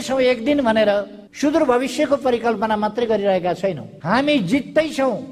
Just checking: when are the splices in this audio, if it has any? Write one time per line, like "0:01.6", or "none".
0:03.9

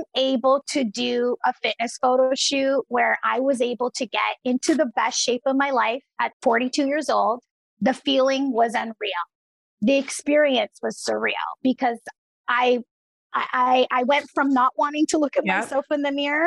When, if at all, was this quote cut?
0:06.3

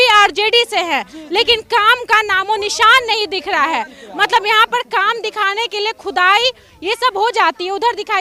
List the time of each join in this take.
none

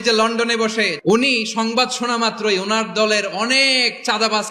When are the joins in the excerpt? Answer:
0:00.9

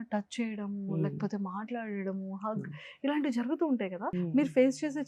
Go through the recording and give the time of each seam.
0:04.1

